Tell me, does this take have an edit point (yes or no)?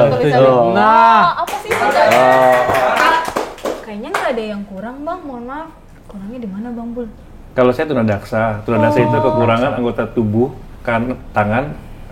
yes